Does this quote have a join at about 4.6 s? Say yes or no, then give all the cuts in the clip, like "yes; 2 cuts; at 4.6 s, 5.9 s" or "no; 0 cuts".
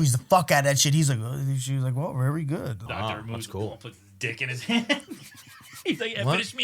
no; 1 cut; at 2.8 s